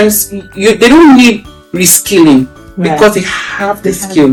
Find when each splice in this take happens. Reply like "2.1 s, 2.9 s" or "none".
none